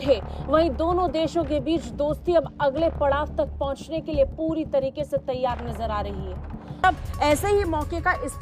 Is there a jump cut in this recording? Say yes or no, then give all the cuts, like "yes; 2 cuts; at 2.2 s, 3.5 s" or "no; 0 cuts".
yes; 1 cut; at 6.8 s